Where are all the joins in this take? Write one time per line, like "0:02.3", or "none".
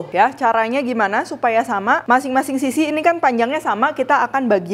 none